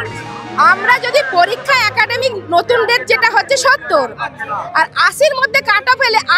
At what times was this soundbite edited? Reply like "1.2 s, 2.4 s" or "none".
none

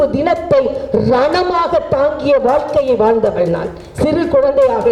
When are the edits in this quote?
none

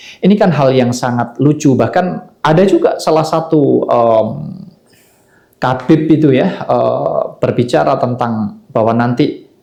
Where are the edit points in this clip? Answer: none

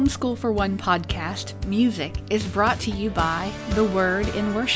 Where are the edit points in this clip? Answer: none

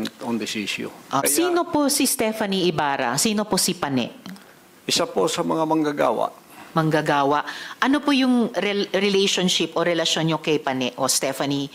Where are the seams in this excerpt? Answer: 1.2 s

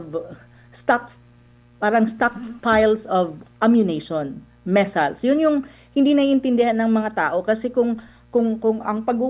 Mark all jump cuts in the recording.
none

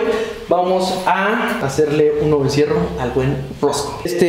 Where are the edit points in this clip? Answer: 1.6 s

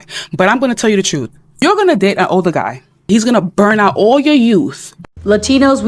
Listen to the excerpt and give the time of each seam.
4.8 s

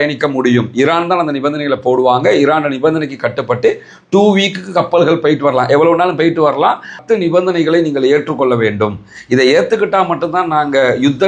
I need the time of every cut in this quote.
7.0 s

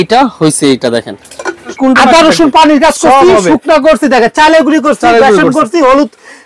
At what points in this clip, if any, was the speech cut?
1.7 s

